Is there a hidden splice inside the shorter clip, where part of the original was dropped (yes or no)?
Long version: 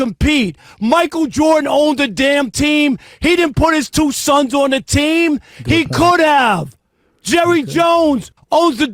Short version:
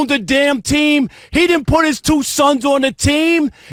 no